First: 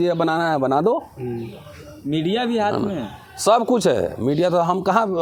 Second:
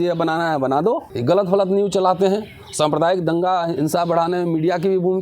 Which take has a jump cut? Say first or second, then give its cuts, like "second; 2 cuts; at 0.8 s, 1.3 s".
second; 1 cut; at 1.1 s